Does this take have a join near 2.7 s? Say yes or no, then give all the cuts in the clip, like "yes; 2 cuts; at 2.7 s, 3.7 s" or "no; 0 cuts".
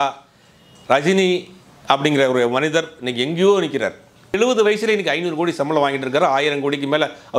no; 1 cut; at 4.4 s